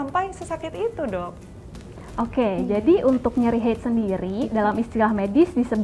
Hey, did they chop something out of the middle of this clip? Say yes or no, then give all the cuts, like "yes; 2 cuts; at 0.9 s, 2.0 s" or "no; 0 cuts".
no; 0 cuts